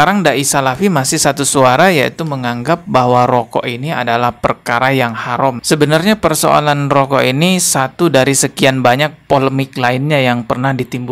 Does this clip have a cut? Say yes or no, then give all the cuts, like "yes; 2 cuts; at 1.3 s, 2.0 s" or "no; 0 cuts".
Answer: yes; 1 cut; at 5.6 s